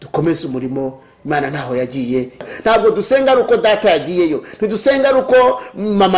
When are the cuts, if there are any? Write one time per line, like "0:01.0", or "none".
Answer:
0:02.4

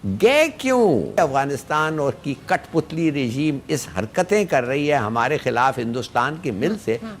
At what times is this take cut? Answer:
0:01.2

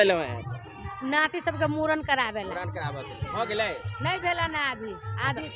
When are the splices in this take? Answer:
none

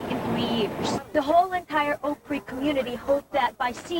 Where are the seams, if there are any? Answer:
0:01.0

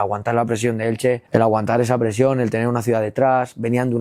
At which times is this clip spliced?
0:01.2

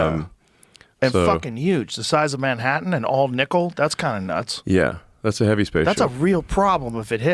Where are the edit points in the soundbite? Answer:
none

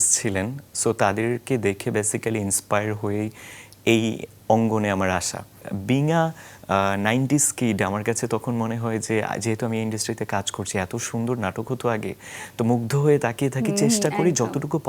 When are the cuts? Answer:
0:05.6

